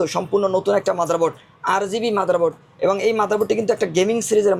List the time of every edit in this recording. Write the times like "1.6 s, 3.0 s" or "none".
none